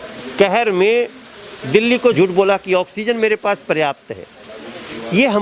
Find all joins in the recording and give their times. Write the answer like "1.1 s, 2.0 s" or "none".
2.1 s